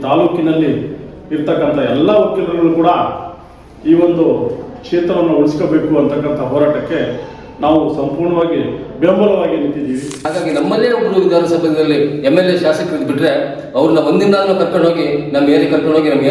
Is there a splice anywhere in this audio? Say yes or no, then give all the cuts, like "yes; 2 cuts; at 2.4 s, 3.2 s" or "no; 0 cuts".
yes; 1 cut; at 10.3 s